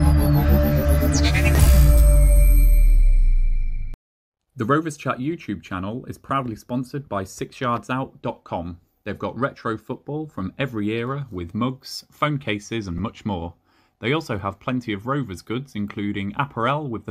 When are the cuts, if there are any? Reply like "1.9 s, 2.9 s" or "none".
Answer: 4.5 s